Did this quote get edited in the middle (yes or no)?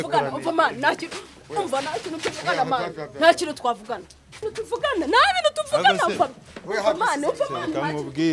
yes